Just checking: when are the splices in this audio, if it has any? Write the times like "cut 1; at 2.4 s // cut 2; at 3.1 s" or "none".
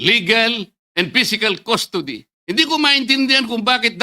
cut 1; at 2.3 s